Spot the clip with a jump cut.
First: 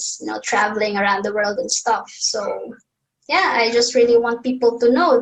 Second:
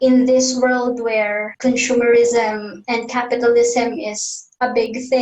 second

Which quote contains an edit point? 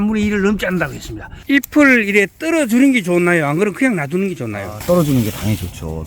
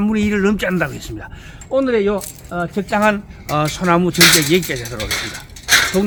first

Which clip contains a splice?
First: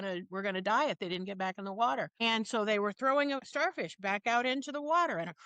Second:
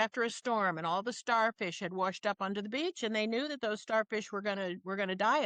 first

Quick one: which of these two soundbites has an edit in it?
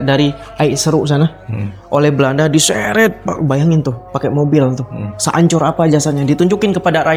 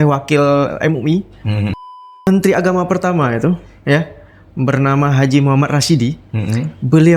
second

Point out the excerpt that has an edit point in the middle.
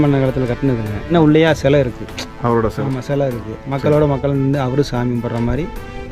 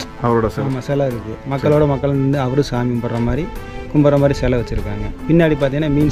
first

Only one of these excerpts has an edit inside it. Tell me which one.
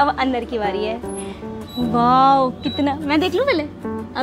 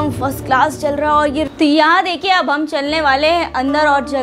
second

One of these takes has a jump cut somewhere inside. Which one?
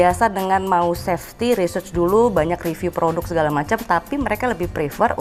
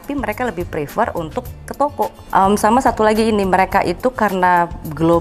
second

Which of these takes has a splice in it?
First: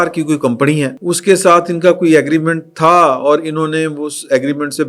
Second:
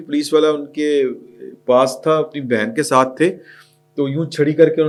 first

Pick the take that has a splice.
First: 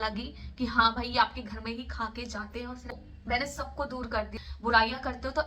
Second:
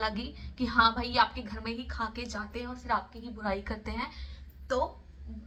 first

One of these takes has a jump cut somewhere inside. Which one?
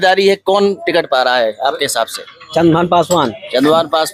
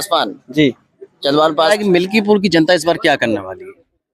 second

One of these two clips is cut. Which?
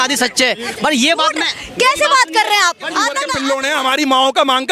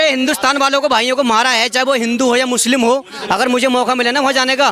first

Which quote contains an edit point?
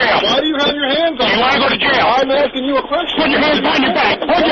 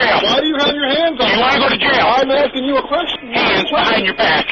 second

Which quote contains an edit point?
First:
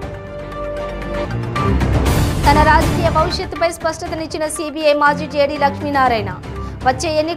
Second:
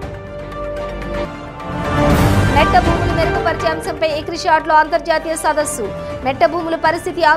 second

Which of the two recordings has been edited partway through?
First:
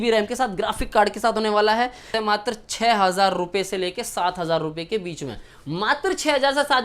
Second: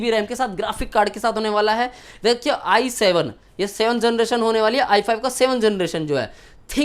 first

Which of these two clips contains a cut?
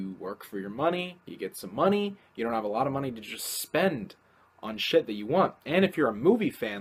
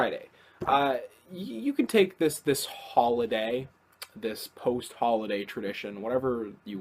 second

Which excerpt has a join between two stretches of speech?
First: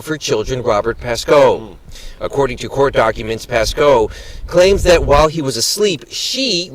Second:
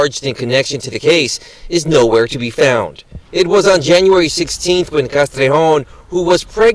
first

